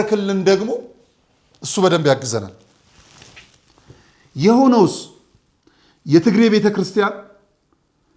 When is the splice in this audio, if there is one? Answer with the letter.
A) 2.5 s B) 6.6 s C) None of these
C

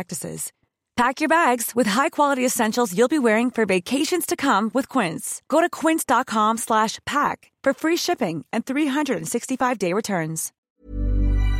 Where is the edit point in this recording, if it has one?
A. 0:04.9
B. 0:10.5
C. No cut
B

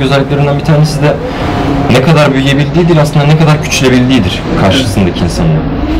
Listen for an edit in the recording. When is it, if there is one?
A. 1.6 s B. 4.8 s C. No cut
C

